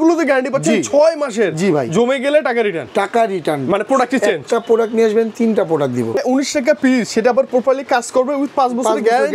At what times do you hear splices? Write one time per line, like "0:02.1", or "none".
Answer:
0:06.2